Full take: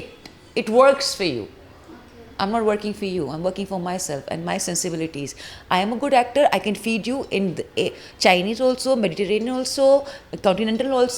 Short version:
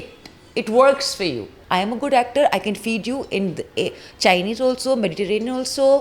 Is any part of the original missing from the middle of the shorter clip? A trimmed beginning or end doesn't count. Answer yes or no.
yes